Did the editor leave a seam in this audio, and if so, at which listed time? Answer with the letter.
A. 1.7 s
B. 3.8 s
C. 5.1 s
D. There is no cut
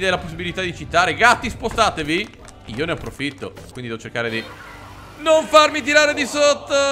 B